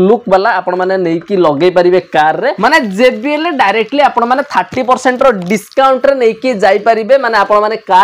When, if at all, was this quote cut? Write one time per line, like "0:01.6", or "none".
0:02.6